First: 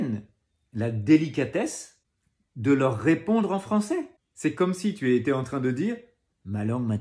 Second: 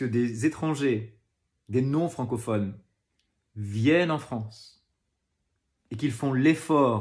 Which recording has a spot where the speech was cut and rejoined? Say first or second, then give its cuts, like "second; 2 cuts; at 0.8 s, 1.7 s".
first; 1 cut; at 4.2 s